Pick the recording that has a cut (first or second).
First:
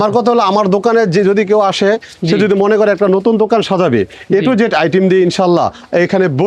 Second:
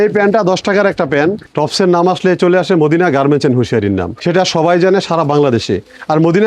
second